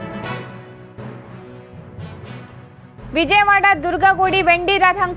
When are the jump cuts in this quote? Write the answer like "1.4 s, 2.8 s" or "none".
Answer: 2.9 s